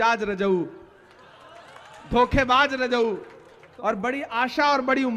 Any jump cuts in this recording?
yes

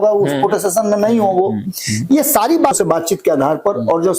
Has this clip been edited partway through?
yes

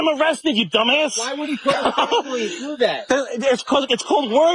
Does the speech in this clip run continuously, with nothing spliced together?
yes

